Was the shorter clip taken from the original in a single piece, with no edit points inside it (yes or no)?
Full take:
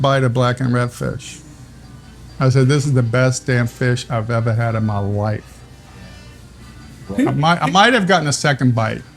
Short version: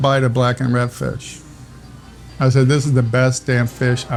yes